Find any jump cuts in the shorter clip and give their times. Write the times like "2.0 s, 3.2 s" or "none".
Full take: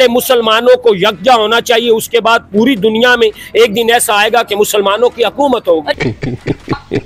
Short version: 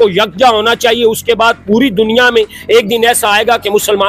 none